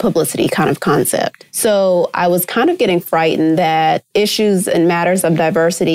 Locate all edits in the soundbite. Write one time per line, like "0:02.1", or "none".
0:01.4
0:04.0